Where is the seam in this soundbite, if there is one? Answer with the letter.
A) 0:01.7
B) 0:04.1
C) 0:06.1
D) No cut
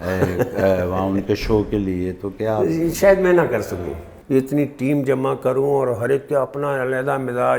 B